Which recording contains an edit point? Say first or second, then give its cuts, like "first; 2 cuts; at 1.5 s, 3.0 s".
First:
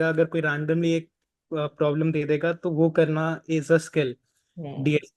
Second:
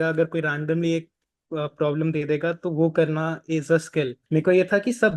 second; 1 cut; at 4.2 s